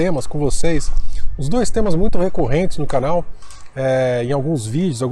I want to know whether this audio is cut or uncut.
uncut